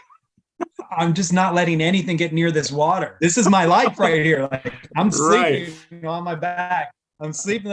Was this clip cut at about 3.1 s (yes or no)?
yes